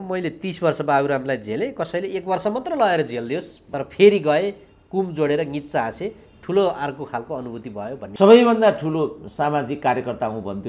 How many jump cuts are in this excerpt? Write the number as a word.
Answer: two